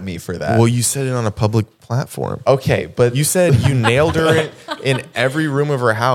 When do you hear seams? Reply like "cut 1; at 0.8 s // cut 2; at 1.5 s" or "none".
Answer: none

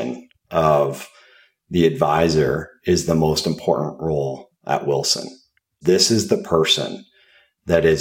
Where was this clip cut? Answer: cut 1; at 5.8 s

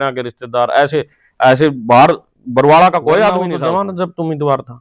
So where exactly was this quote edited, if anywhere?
cut 1; at 3.5 s

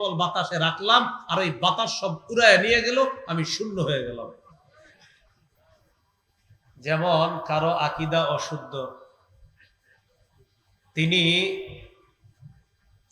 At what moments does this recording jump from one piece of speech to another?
cut 1; at 5.5 s

